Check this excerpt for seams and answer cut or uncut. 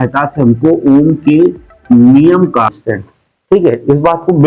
cut